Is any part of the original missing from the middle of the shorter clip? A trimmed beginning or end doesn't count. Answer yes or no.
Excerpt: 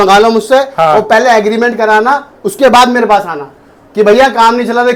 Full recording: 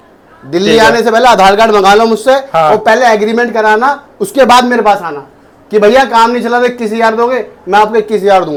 no